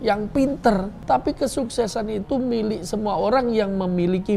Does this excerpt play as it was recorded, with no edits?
no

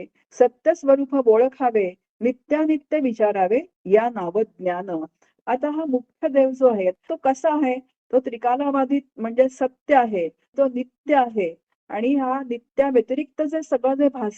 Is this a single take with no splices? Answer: no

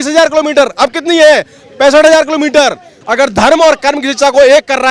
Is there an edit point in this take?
yes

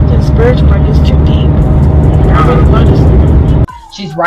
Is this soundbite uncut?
yes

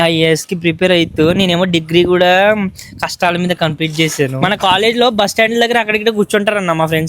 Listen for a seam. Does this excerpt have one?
yes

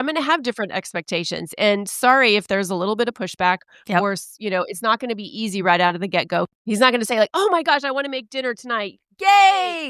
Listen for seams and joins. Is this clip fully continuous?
yes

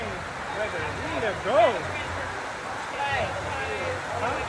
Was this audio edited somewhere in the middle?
no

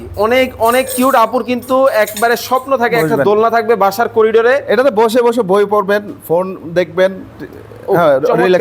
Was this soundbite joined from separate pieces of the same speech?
no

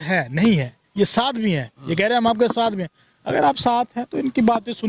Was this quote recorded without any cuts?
yes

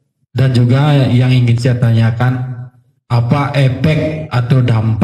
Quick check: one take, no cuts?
yes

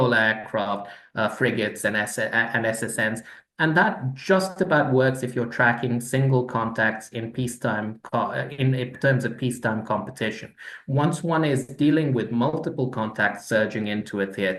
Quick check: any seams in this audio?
no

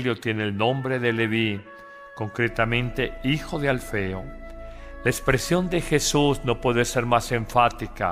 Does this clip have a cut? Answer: no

